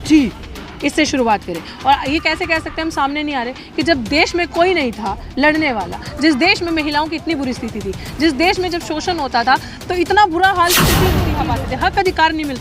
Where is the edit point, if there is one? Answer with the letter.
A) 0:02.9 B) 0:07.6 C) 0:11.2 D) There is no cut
C